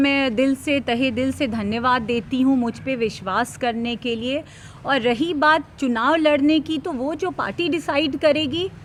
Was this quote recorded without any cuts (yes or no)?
yes